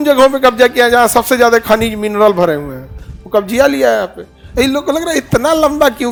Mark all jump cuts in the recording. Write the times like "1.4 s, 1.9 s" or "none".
none

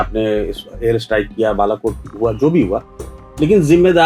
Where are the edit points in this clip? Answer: none

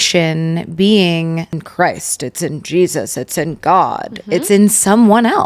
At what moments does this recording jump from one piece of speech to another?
1.6 s

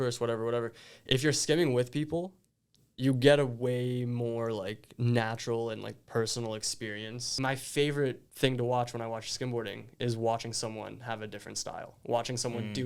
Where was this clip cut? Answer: 7.3 s, 8.3 s

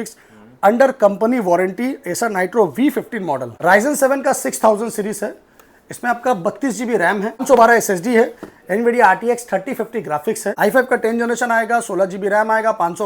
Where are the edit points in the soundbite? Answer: 3.5 s, 7.4 s, 10.6 s

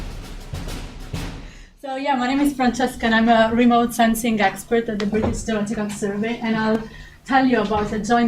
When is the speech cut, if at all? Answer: 1.6 s

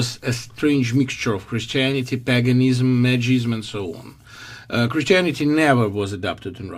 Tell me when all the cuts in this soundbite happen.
2.8 s

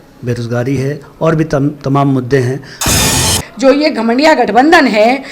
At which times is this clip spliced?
3.1 s

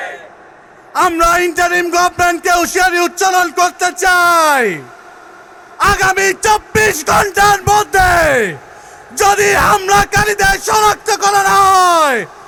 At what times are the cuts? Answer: none

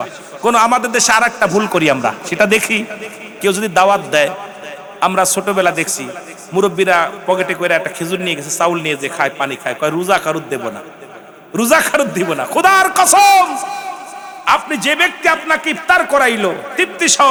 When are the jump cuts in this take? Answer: none

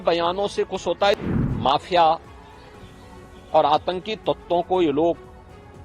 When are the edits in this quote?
1.1 s

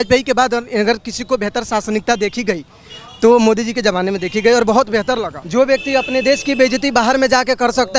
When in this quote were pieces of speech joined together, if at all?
5.4 s

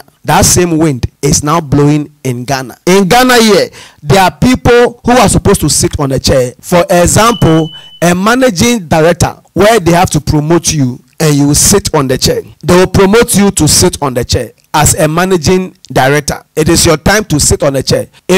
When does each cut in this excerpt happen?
2.7 s

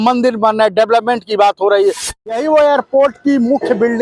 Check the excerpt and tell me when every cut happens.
2.1 s

